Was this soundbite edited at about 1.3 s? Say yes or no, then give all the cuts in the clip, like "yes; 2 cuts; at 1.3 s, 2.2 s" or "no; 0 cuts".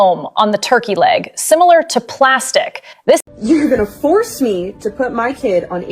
no; 1 cut; at 3.2 s